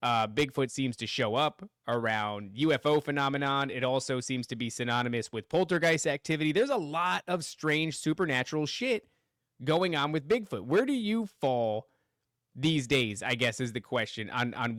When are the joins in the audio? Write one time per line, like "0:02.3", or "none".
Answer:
none